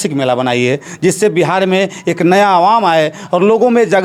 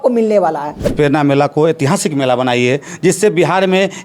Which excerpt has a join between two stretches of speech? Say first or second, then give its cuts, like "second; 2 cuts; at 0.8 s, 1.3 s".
second; 1 cut; at 0.9 s